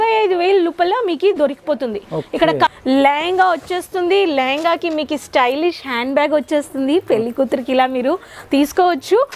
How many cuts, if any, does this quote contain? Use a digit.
1